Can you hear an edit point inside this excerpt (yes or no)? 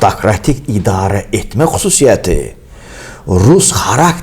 no